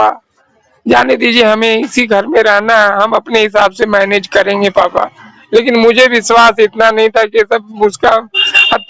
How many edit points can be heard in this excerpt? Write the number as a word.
zero